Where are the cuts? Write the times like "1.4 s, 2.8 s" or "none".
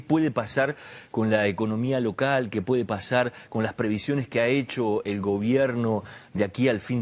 5.9 s